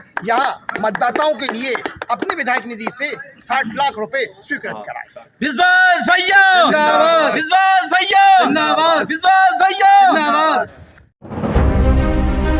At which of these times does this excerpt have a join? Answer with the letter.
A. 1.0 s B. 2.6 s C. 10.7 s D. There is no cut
D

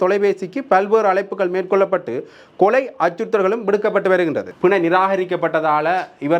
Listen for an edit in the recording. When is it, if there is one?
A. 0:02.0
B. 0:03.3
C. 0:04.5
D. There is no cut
C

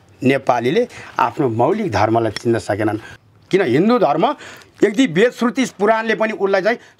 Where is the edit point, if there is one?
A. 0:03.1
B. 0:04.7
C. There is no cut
A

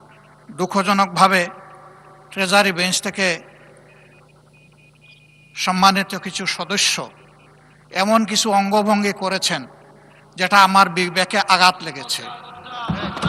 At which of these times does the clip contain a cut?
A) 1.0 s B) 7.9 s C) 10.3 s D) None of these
D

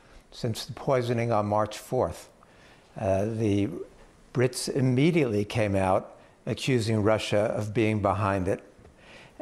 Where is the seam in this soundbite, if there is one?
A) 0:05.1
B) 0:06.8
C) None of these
A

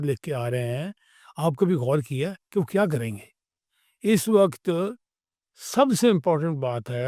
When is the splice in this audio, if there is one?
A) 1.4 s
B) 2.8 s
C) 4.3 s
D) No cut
D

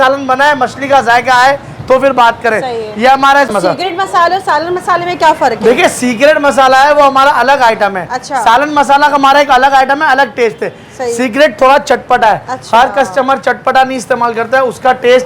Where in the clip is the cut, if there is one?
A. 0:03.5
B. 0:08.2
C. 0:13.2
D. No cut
A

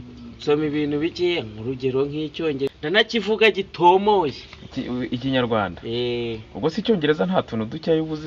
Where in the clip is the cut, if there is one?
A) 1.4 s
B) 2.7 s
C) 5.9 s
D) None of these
B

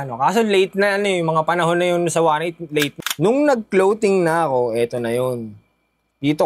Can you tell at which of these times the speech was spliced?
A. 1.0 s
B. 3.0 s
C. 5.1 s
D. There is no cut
B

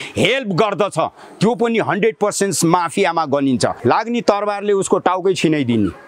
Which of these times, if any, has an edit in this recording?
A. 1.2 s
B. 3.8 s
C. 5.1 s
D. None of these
B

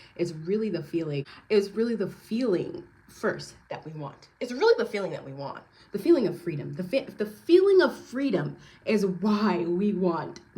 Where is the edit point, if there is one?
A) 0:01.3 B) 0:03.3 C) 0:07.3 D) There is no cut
A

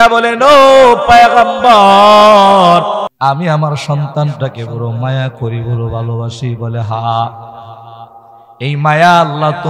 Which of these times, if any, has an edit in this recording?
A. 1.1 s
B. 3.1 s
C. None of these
B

